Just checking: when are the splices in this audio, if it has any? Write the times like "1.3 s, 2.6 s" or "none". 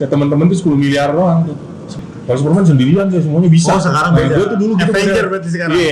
1.8 s

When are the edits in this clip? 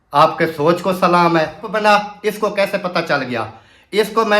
1.7 s

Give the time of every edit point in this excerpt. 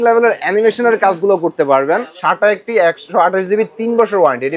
2.1 s

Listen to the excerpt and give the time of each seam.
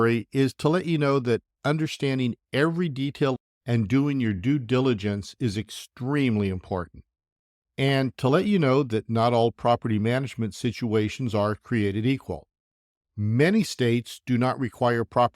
3.3 s

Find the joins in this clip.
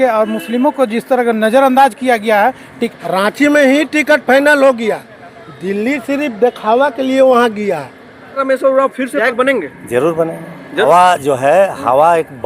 2.7 s, 8.4 s, 9.2 s, 10.8 s

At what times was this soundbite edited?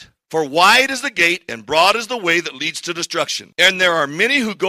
3.4 s

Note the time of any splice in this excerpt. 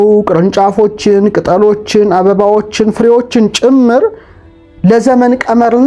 none

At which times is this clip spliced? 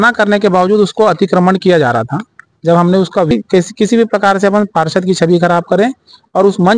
3.3 s

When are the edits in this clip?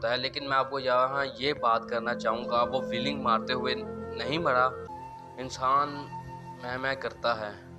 4.8 s

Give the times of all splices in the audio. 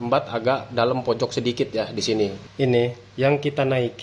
2.4 s

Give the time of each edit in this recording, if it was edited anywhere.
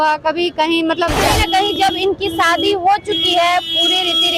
1.2 s

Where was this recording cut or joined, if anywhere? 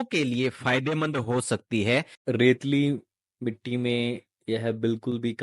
2.2 s

